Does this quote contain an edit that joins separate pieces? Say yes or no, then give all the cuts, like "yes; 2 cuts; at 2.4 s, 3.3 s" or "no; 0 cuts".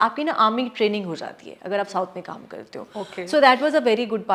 no; 0 cuts